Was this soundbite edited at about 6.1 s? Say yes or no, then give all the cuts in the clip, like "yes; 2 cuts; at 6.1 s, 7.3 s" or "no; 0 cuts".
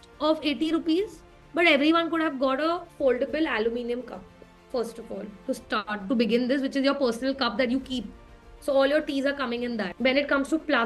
no; 1 cut; at 9.9 s